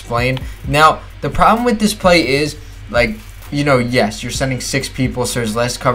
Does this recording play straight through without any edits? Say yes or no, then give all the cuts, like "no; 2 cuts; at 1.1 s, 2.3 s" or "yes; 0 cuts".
yes; 0 cuts